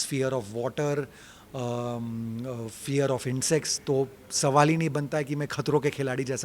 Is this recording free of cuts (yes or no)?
yes